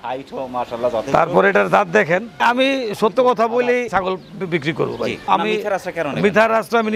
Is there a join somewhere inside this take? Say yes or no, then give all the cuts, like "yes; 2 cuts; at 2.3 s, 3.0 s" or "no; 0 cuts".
yes; 1 cut; at 2.3 s